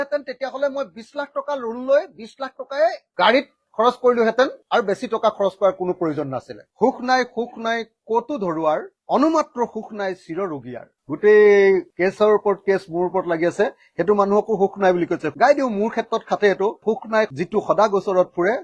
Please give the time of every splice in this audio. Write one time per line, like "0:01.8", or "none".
0:06.6
0:11.0
0:15.3
0:16.8